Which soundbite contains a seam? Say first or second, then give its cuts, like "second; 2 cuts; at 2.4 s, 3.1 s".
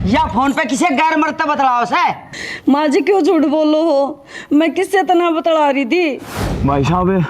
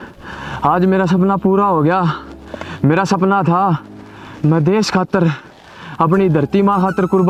first; 1 cut; at 6.3 s